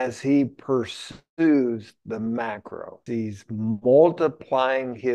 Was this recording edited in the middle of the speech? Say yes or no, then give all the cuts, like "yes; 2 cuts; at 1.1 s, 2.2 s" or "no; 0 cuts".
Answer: yes; 1 cut; at 3.0 s